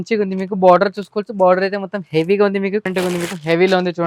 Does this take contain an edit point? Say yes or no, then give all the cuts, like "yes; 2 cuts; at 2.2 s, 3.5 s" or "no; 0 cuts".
yes; 1 cut; at 2.9 s